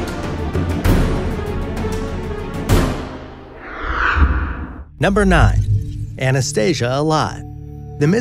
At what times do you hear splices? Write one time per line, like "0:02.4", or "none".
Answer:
0:05.4